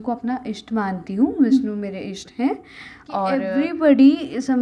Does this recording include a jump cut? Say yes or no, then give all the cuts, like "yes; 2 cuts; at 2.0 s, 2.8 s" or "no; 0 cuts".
yes; 1 cut; at 3.3 s